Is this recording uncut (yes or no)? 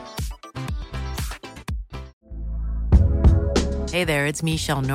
no